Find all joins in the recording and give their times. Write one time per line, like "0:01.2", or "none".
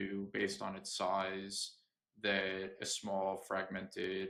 none